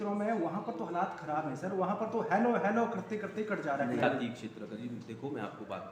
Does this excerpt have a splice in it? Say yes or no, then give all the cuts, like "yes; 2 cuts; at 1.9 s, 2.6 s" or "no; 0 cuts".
yes; 1 cut; at 4.0 s